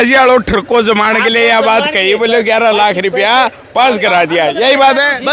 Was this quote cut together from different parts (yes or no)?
no